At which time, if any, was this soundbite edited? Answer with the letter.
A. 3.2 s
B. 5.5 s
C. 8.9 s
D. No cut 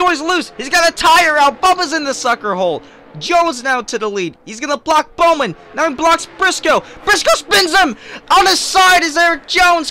D